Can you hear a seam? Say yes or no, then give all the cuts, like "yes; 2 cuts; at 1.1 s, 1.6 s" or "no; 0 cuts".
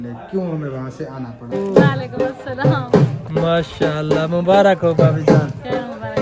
yes; 1 cut; at 1.6 s